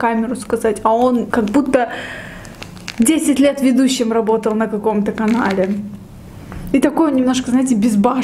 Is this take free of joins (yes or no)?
yes